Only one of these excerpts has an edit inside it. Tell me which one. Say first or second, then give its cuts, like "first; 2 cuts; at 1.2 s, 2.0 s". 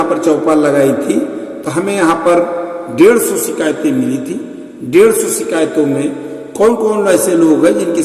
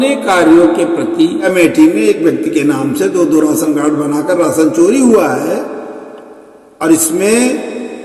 second; 1 cut; at 1.5 s